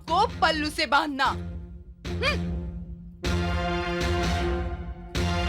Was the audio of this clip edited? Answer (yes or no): no